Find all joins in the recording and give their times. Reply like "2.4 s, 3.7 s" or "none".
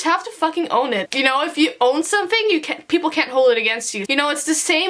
1.1 s, 4.0 s